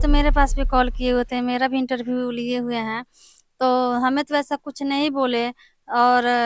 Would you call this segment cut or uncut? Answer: uncut